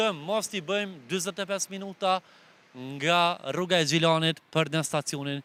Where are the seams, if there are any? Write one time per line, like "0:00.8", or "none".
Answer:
none